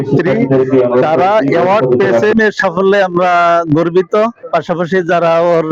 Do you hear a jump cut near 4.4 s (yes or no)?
no